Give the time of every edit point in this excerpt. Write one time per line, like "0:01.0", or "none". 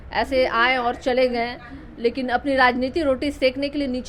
none

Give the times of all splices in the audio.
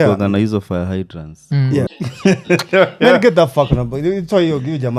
0:02.0

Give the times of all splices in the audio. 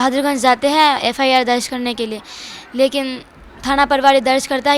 none

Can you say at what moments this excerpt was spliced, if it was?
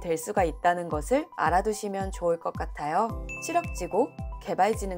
0:03.3

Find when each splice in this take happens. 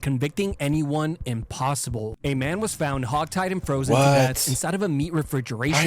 0:02.1

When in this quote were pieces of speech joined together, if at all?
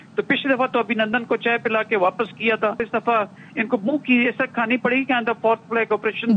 0:02.9

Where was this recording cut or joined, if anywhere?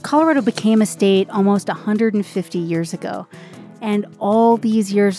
none

